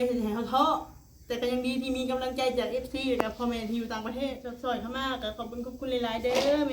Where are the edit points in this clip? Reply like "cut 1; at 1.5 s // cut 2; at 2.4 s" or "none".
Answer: cut 1; at 4.5 s